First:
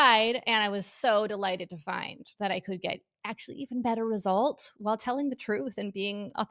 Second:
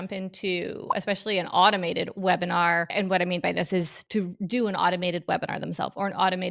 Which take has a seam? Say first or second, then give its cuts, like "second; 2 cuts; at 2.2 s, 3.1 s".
second; 2 cuts; at 2.9 s, 4.0 s